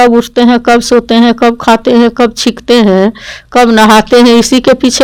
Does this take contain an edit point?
no; 0 cuts

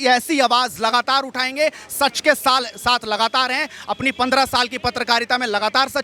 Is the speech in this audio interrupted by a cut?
no; 0 cuts

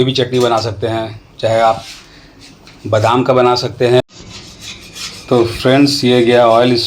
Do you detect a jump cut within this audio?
yes; 1 cut; at 4.0 s

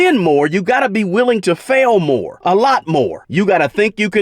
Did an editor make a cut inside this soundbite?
yes; 2 cuts; at 2.3 s, 3.2 s

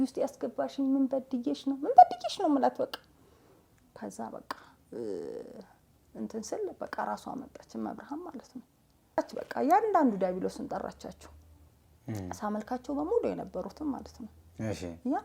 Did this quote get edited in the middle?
yes; 1 cut; at 9.2 s

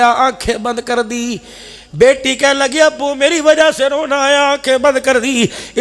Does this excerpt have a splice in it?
no; 0 cuts

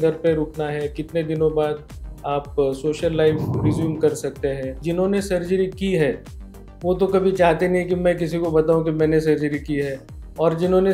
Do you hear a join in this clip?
yes; 1 cut; at 4.8 s

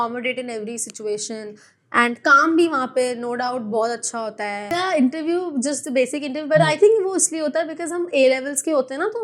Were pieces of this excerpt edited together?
yes; 1 cut; at 4.7 s

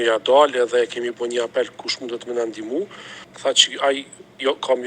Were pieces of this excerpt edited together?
yes; 1 cut; at 3.2 s

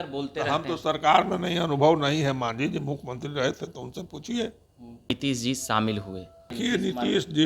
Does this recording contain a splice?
yes; 2 cuts; at 5.1 s, 6.5 s

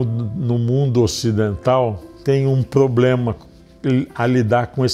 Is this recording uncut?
no; 1 cut; at 2.1 s

